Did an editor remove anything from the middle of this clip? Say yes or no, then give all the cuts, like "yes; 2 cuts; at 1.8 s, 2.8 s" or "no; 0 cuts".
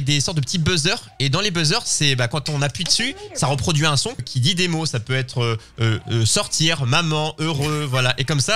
yes; 1 cut; at 4.2 s